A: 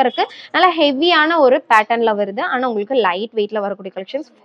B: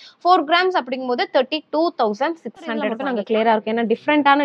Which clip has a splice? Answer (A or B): B